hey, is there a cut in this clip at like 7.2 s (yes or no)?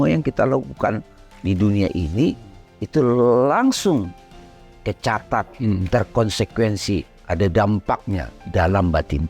yes